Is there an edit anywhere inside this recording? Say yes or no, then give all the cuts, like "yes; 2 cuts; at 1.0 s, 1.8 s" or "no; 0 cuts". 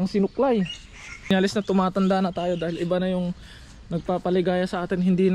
yes; 1 cut; at 1.3 s